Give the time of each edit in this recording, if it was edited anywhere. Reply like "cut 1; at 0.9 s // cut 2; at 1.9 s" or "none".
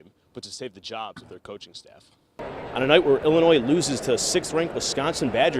cut 1; at 2.6 s